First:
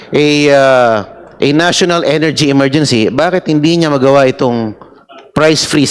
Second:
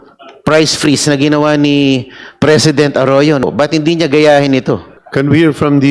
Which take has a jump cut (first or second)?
second